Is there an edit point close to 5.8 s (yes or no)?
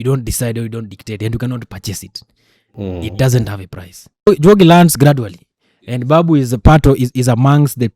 no